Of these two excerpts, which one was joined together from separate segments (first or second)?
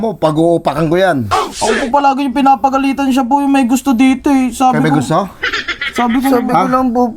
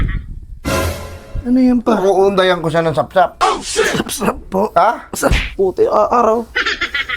second